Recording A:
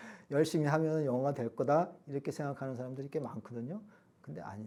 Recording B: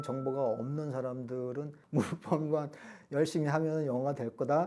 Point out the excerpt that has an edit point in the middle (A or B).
B